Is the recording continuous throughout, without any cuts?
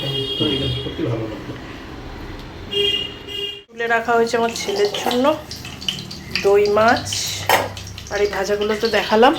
no; 1 cut; at 3.7 s

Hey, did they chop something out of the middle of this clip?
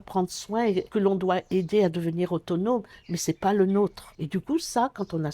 yes; 2 cuts; at 0.9 s, 4.1 s

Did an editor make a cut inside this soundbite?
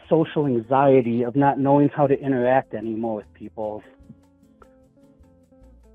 no; 0 cuts

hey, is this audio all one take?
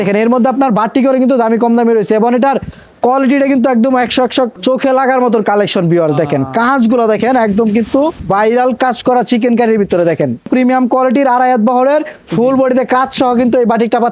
no; 3 cuts; at 4.5 s, 8.2 s, 10.5 s

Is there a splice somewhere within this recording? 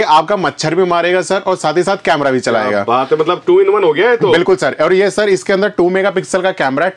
no; 0 cuts

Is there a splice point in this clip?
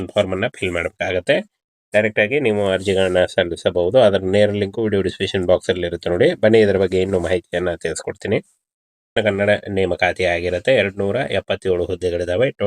yes; 1 cut; at 9.2 s

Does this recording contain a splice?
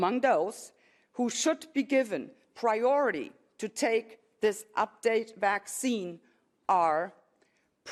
no; 0 cuts

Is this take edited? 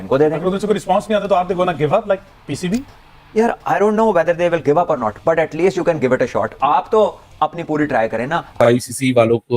yes; 1 cut; at 8.5 s

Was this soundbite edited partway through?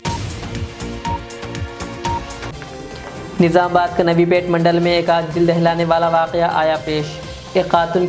no; 0 cuts

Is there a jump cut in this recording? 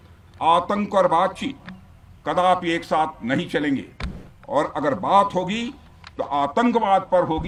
no; 0 cuts

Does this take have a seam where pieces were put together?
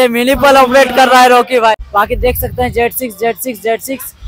yes; 1 cut; at 1.8 s

